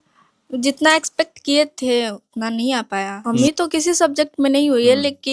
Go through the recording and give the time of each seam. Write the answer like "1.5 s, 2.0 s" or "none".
3.2 s

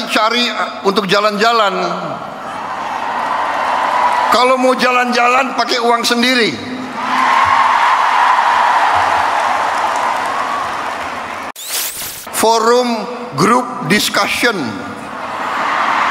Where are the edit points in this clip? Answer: 11.6 s

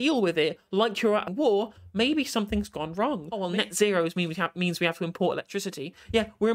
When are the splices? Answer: 1.3 s, 3.4 s

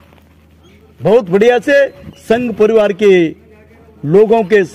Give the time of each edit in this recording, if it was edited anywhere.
none

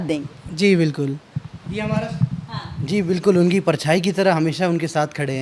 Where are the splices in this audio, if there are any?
none

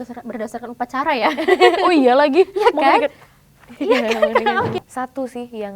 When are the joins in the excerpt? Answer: 4.8 s

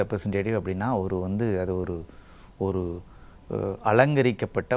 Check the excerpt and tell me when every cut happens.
none

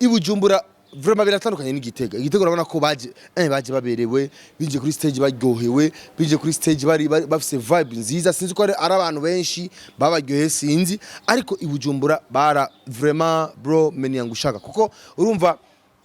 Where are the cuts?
none

